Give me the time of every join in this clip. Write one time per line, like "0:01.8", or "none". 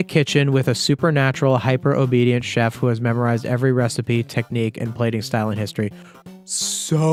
none